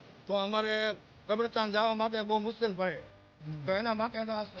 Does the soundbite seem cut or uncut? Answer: uncut